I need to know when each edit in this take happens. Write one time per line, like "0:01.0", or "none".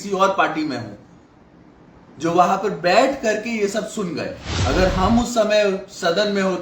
0:04.5